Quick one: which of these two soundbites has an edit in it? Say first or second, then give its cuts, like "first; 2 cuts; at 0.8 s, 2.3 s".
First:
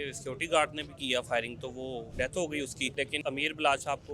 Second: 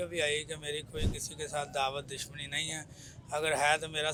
first; 2 cuts; at 2.1 s, 3.1 s